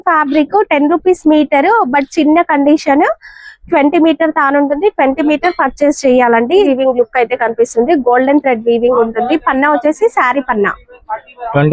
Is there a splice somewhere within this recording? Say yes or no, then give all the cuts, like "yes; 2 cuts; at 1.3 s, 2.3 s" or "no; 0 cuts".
yes; 1 cut; at 6.6 s